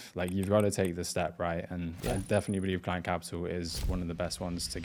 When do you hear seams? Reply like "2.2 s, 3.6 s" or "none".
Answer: none